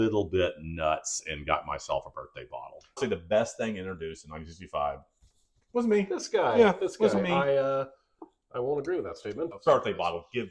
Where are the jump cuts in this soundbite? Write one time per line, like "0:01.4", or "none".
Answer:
0:03.0
0:09.5